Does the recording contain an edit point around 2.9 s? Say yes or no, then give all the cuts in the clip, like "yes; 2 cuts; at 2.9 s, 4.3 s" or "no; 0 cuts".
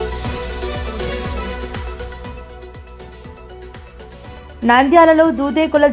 yes; 1 cut; at 2.9 s